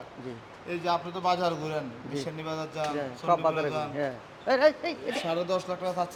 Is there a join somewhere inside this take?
no; 0 cuts

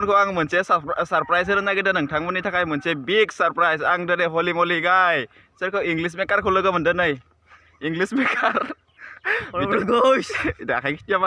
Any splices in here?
no; 0 cuts

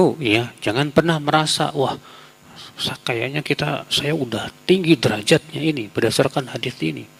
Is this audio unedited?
yes; 0 cuts

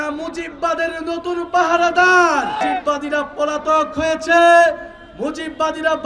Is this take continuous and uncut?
no; 1 cut; at 2.6 s

